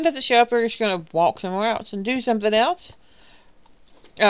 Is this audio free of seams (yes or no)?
no